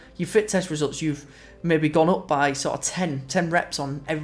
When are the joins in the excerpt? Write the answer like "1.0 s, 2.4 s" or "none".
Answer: none